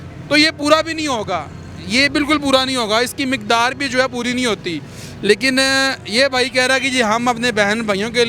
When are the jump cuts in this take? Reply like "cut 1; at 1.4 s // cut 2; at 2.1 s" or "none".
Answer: none

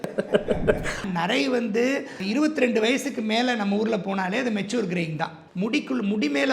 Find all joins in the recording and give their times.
cut 1; at 1.1 s // cut 2; at 5.4 s

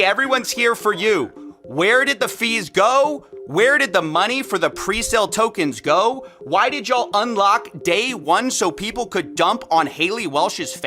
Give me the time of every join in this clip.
cut 1; at 1.3 s

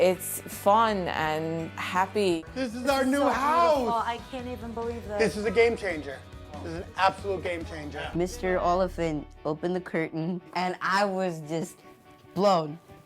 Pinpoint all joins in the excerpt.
cut 1; at 2.4 s // cut 2; at 8.0 s

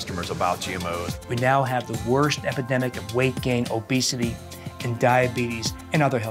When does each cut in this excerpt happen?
cut 1; at 1.1 s

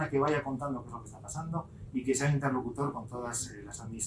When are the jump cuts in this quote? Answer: none

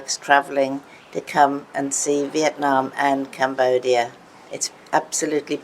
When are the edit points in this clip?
none

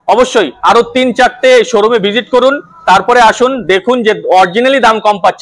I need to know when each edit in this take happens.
none

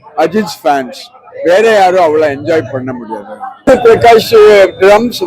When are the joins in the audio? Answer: cut 1; at 3.7 s

